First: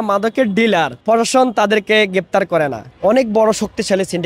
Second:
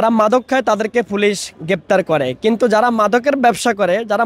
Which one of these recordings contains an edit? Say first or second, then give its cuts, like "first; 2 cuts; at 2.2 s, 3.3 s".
first; 2 cuts; at 1.0 s, 2.8 s